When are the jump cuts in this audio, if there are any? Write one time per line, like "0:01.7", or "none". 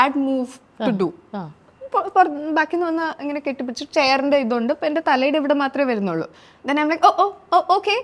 none